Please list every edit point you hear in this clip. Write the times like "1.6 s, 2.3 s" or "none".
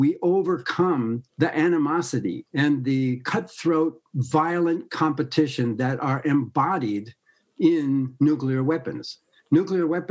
1.2 s, 2.4 s